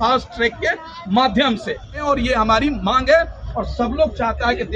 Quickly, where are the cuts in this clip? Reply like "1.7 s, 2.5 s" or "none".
2.0 s, 3.4 s